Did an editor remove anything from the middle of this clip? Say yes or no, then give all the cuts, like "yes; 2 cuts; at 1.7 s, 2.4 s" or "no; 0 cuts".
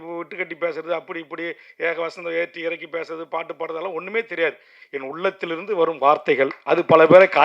no; 0 cuts